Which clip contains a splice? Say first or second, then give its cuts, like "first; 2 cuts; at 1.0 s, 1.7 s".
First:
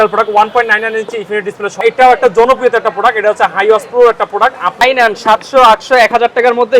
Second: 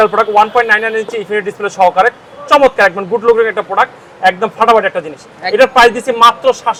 first; 2 cuts; at 1.8 s, 4.8 s